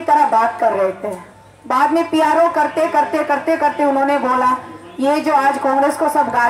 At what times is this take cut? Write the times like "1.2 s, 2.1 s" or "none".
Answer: none

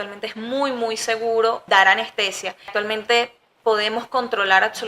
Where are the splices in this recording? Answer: 1.6 s, 2.7 s

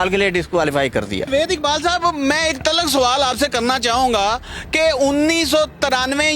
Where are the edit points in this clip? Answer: 1.3 s

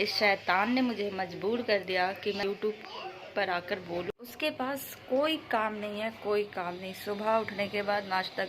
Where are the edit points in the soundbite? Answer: 2.4 s, 4.1 s

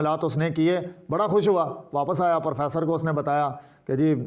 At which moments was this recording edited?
none

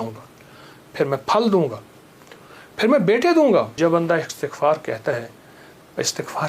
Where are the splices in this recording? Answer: 3.7 s

